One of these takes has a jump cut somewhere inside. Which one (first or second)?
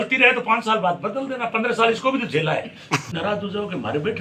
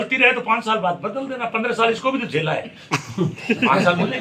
first